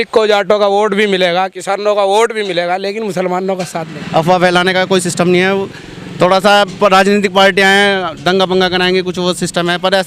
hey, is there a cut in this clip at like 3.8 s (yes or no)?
yes